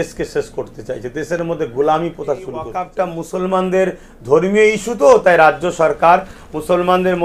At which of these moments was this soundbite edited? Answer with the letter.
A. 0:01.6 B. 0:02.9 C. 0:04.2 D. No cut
B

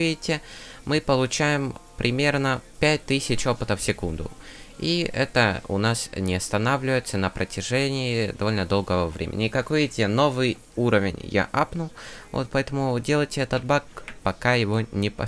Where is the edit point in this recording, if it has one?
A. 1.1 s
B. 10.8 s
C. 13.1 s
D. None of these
D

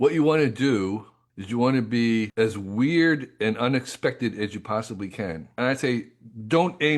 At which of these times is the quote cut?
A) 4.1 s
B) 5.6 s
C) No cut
B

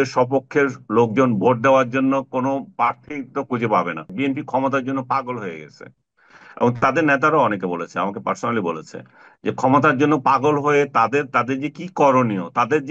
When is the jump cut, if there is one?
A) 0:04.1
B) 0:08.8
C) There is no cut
A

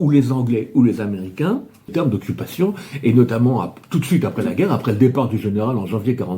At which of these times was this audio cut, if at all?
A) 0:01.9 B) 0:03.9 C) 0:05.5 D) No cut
A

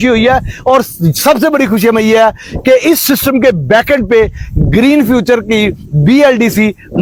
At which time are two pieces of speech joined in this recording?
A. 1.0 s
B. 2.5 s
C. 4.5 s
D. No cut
D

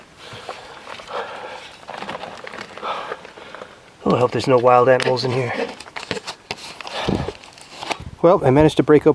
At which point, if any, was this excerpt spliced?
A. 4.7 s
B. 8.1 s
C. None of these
B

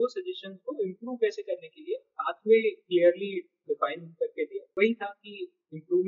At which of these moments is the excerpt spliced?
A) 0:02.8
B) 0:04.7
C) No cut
B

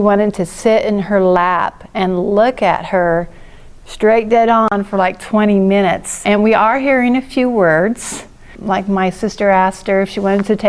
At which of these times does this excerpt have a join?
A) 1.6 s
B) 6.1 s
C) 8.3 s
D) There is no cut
B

